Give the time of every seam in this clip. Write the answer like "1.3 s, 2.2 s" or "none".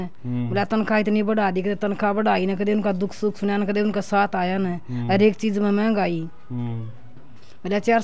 none